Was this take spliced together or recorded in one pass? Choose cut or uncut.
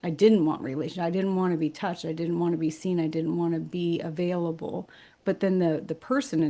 uncut